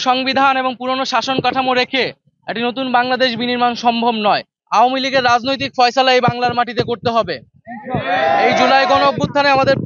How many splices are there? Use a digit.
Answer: 1